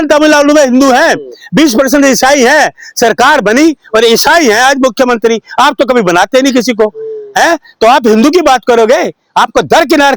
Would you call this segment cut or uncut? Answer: uncut